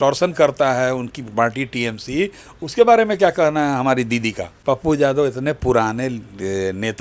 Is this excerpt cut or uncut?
cut